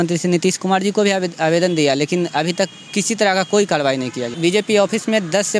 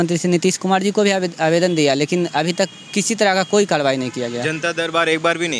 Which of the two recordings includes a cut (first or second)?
first